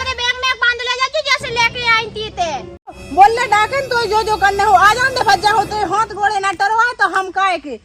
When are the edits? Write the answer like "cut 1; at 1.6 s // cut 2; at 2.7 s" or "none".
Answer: cut 1; at 3.0 s